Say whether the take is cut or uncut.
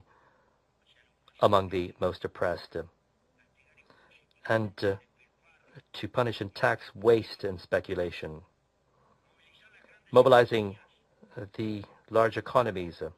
uncut